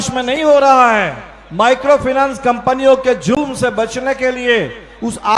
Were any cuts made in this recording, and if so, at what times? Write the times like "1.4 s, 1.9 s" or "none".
none